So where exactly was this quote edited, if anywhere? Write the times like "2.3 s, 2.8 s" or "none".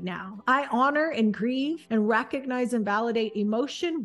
1.8 s